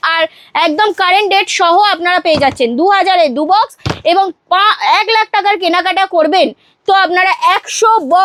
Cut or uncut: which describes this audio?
uncut